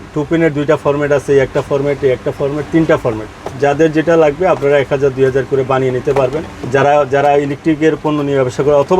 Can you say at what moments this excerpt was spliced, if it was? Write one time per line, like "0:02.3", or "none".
0:06.6